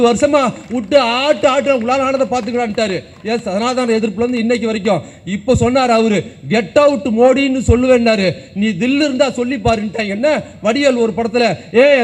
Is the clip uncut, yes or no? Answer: yes